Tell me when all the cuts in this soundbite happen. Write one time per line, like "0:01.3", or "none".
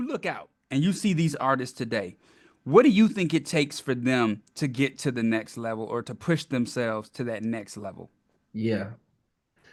none